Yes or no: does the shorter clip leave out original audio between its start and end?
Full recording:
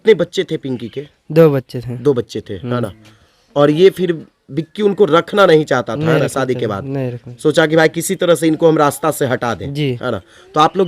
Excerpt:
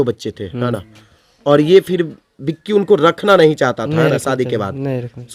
no